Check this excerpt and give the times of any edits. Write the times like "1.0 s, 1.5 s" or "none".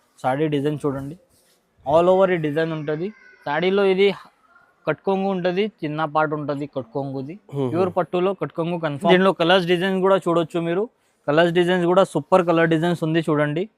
9.1 s